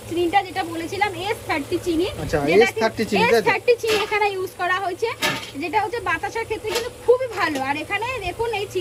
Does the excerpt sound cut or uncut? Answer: uncut